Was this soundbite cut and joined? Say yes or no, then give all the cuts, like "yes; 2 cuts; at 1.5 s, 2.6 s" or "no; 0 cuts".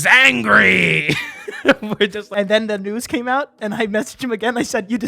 yes; 1 cut; at 2.2 s